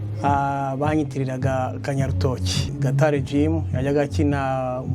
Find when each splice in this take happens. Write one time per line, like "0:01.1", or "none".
0:02.7